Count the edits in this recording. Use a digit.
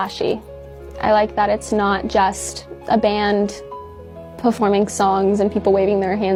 0